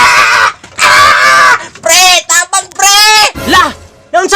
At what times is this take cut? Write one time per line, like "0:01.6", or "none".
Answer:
0:03.4